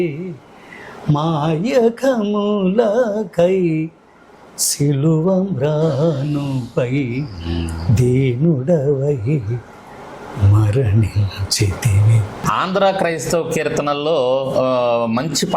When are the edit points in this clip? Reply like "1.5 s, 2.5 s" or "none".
12.3 s